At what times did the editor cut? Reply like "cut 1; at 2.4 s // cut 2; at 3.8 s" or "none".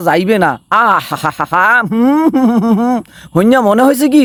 none